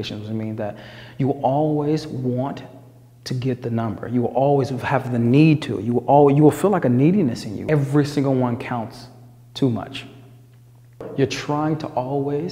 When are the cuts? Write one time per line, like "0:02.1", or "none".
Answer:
0:07.5
0:11.0